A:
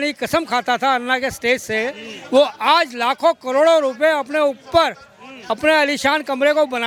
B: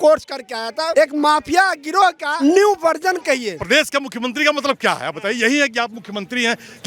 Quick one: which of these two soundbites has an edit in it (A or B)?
B